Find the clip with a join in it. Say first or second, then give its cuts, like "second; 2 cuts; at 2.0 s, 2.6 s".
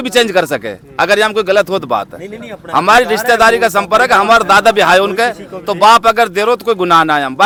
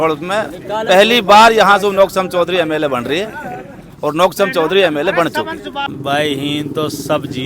second; 1 cut; at 5.9 s